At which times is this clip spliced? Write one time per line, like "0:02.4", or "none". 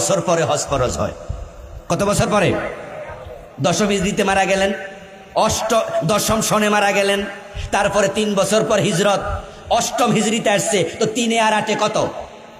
none